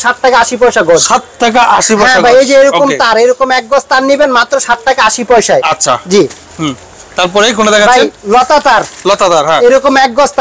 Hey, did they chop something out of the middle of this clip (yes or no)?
no